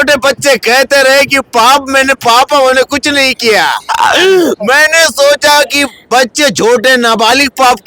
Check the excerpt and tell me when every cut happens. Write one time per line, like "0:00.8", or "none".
none